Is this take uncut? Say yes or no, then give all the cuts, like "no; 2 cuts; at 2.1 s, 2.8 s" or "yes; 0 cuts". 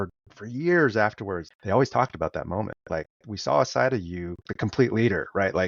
no; 3 cuts; at 1.5 s, 2.8 s, 4.4 s